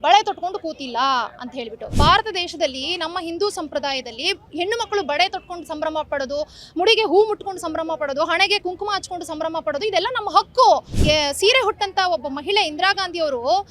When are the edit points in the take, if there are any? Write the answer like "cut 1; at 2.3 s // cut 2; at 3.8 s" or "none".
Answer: cut 1; at 1.8 s // cut 2; at 10.9 s